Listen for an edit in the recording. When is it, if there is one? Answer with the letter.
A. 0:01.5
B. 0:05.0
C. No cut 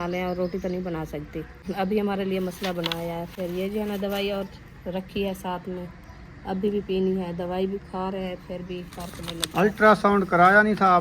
A